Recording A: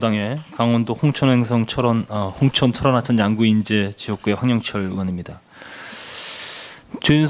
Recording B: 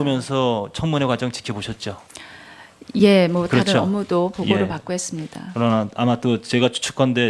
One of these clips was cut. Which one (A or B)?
B